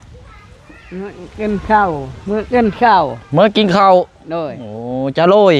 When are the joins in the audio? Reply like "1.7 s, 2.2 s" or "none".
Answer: none